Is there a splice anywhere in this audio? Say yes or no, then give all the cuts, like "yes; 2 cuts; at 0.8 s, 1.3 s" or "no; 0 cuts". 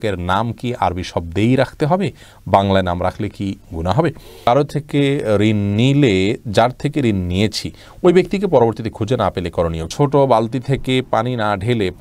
yes; 2 cuts; at 4.5 s, 9.9 s